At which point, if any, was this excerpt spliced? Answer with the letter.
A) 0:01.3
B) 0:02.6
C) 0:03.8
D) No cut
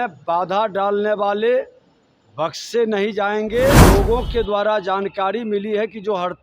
C